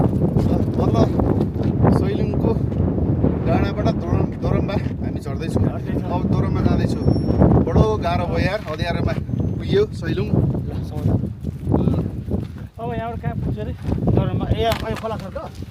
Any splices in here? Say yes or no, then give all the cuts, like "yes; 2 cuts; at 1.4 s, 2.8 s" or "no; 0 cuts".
no; 0 cuts